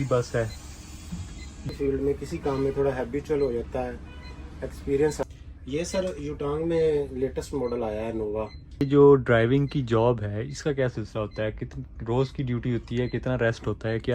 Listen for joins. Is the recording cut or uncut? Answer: cut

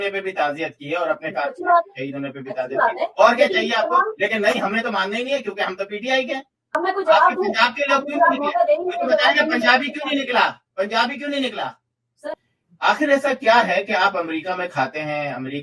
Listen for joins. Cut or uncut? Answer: cut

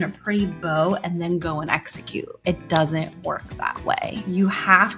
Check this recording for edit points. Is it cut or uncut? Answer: cut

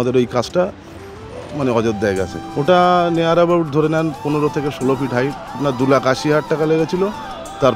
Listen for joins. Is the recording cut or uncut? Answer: cut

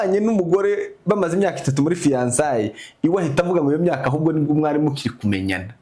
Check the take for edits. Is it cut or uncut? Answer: uncut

